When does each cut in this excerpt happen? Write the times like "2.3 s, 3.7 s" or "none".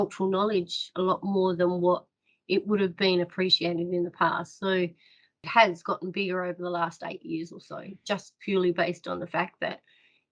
5.5 s